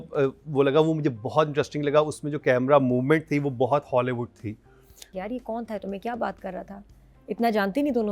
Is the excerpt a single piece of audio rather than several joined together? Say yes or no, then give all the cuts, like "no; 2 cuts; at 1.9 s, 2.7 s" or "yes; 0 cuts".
no; 1 cut; at 5.0 s